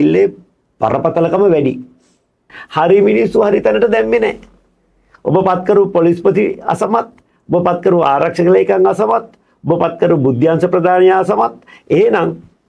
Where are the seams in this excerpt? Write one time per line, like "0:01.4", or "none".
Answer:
0:02.6